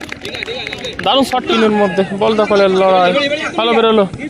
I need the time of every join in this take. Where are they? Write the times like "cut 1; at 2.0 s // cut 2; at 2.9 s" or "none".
cut 1; at 1.3 s